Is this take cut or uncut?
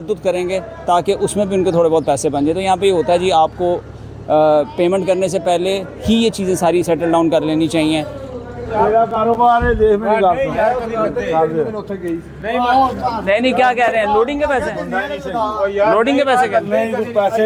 uncut